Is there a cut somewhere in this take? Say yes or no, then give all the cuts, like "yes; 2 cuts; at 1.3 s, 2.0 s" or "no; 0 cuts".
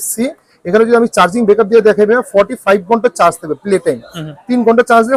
no; 0 cuts